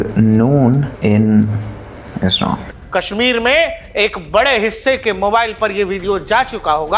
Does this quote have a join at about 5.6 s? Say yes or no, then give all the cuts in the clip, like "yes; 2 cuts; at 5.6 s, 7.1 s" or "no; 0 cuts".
no; 2 cuts; at 0.9 s, 2.8 s